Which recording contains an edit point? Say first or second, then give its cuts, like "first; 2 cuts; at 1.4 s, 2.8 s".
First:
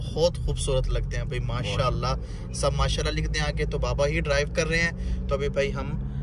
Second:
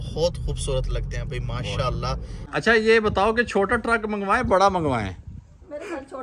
second; 1 cut; at 2.3 s